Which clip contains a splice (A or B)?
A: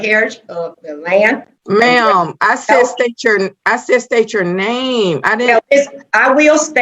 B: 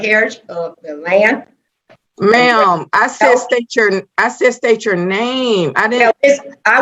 A